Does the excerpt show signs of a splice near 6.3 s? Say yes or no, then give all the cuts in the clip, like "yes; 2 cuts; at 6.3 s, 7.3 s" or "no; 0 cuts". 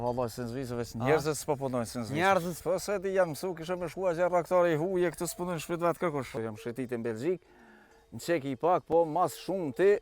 yes; 2 cuts; at 2.5 s, 6.3 s